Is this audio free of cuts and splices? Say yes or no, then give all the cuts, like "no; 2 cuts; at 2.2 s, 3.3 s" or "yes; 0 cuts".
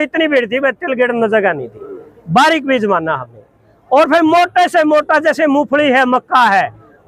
yes; 0 cuts